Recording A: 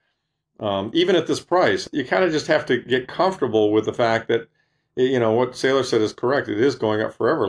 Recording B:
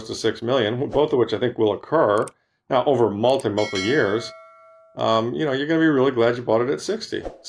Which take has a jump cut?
A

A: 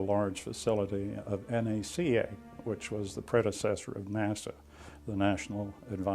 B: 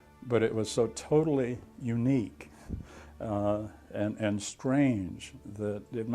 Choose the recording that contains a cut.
A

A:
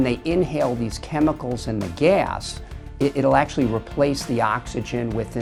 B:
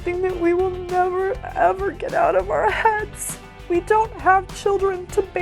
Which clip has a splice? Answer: B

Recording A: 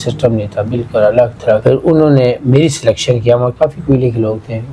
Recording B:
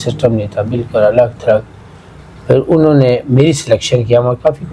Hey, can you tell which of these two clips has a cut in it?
A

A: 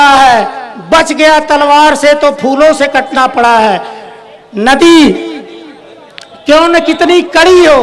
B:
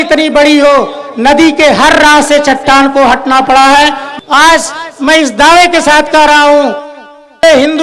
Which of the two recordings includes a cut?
B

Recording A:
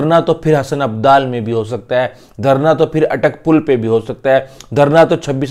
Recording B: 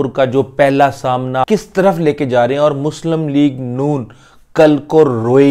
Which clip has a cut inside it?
B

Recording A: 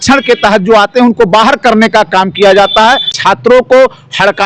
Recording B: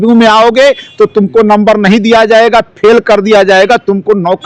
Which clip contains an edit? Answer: A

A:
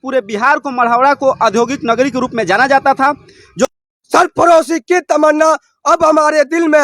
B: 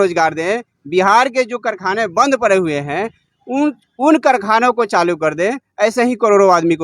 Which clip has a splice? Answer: A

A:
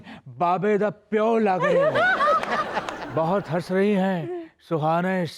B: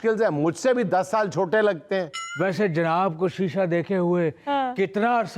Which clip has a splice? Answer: B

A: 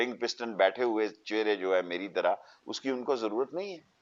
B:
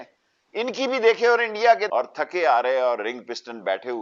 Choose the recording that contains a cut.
B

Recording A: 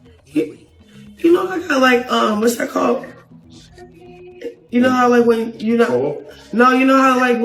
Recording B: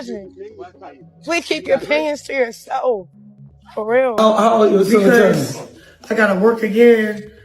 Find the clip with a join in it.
B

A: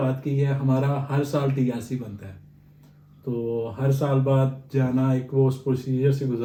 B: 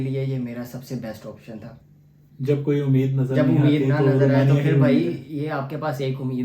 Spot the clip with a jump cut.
B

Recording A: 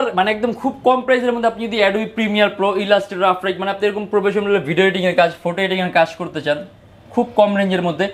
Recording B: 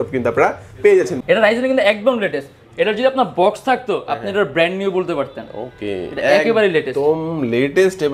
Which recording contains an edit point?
B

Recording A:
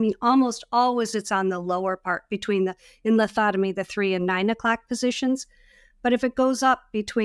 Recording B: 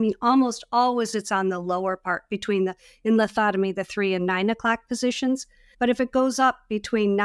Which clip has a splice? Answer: B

